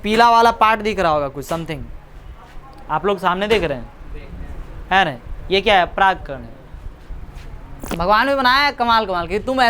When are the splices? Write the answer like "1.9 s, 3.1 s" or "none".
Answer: 7.9 s